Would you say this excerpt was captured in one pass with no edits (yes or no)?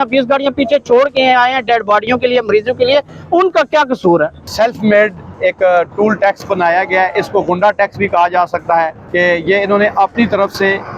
no